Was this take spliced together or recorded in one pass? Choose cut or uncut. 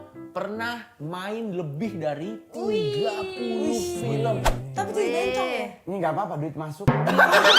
uncut